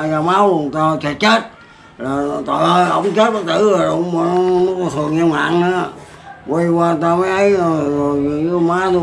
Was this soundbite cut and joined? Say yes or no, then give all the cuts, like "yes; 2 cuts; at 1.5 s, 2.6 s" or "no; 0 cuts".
no; 0 cuts